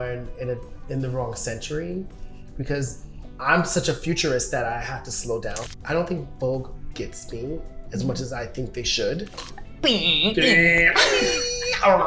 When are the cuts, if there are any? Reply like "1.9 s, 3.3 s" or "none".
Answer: 5.7 s, 9.4 s